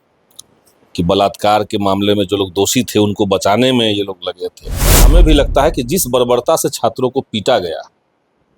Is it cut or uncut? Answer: cut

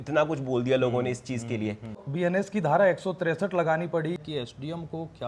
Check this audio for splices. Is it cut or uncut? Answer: cut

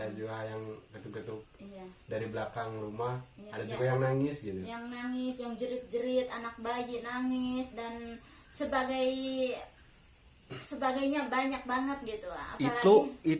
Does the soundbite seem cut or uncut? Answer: uncut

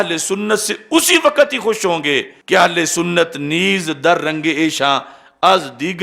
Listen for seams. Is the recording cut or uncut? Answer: cut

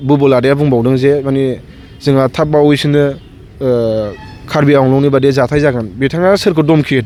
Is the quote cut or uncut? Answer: uncut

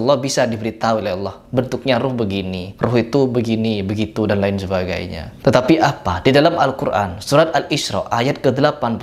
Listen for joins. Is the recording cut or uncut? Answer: uncut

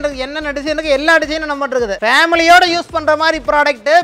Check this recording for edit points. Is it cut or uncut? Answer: cut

